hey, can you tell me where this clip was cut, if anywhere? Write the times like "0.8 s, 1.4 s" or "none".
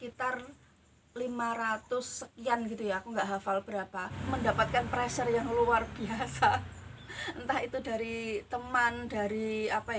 4.2 s